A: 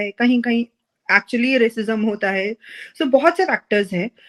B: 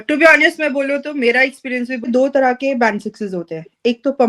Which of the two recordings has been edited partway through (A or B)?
B